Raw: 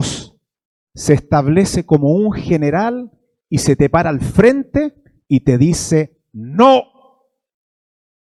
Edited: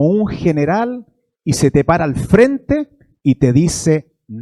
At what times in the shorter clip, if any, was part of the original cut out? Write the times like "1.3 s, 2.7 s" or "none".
none